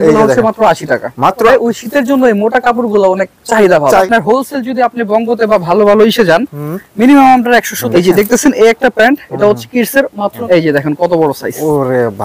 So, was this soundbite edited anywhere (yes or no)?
yes